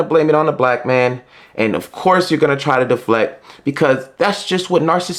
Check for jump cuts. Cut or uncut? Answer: uncut